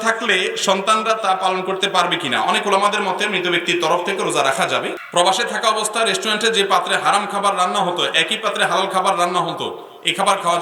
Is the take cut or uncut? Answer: cut